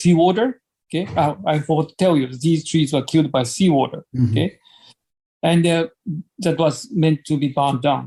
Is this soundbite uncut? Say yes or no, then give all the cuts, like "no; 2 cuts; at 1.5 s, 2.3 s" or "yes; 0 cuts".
yes; 0 cuts